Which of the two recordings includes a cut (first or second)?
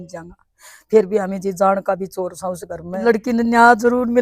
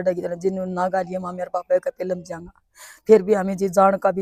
first